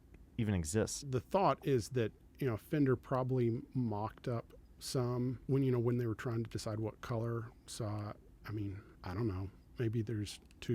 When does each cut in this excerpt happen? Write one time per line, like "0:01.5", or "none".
0:01.0
0:05.4
0:08.9